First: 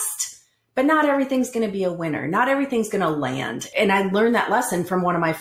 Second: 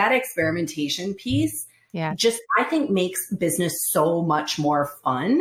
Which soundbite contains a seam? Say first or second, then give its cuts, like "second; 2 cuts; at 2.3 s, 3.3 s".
first; 1 cut; at 3.6 s